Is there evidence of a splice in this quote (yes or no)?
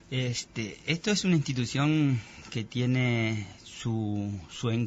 no